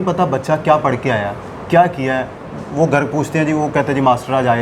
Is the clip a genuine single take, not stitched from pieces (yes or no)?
yes